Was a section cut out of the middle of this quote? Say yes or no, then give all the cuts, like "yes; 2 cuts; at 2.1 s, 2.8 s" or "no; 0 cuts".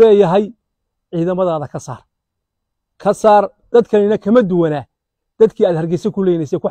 yes; 1 cut; at 3.6 s